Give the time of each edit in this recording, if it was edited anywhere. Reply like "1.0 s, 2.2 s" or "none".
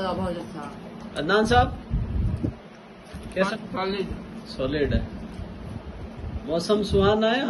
3.5 s

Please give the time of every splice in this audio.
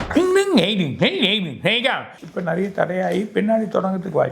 2.1 s

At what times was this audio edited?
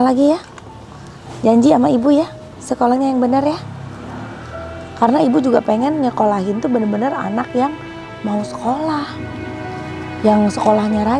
none

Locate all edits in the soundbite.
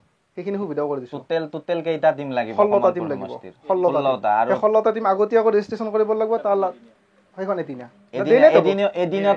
none

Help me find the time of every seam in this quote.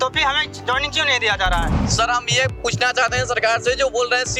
1.8 s

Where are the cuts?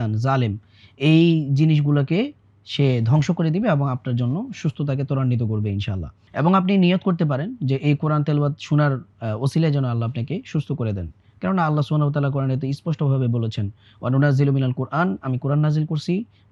none

